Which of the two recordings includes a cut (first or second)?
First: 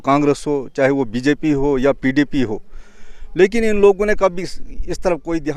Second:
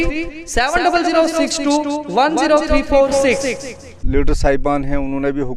second